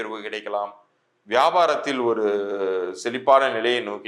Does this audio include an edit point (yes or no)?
no